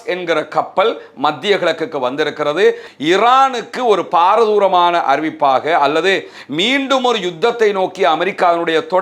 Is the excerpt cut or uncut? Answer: cut